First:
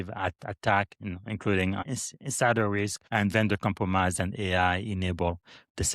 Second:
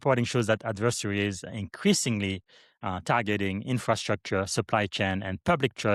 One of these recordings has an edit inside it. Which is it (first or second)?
first